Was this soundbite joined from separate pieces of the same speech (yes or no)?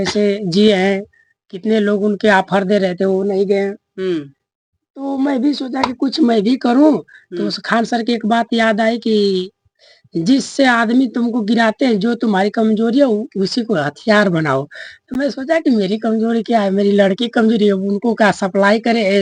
no